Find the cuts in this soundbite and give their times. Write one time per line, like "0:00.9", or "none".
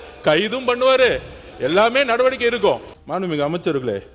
0:03.0